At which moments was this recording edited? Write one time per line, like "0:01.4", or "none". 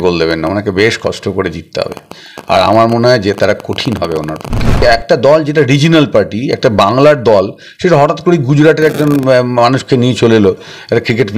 0:04.8